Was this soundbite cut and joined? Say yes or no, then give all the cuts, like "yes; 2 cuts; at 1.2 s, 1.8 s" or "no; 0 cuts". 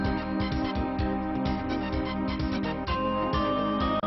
yes; 1 cut; at 2.0 s